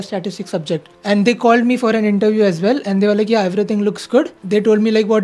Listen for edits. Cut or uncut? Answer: cut